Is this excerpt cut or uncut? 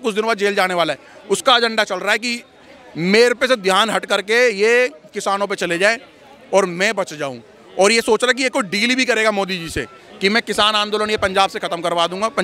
uncut